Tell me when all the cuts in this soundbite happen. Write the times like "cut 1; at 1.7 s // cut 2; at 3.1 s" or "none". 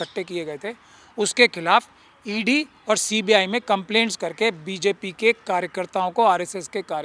none